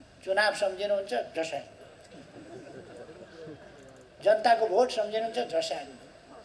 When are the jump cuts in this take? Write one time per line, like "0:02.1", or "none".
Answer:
none